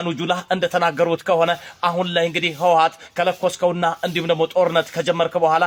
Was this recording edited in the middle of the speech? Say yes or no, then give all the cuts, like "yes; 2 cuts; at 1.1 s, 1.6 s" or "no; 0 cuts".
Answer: no; 0 cuts